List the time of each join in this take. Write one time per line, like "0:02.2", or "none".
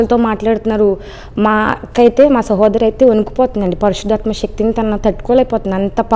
none